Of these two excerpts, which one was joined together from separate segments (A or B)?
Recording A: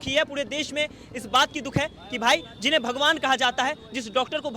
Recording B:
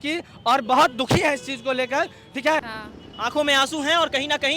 B